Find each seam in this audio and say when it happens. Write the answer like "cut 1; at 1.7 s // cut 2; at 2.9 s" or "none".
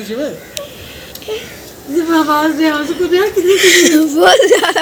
none